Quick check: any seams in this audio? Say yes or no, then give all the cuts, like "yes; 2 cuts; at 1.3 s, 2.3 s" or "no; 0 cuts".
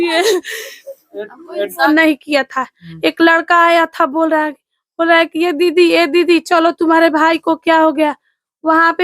yes; 1 cut; at 1.9 s